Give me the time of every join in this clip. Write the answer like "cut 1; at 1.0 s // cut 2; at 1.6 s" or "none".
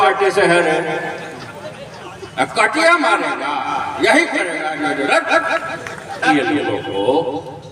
cut 1; at 6.2 s